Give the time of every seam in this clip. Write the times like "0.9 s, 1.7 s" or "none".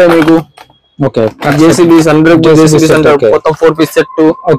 none